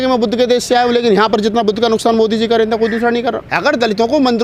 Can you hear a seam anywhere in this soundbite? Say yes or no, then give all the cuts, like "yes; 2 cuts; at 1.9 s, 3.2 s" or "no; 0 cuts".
yes; 1 cut; at 3.5 s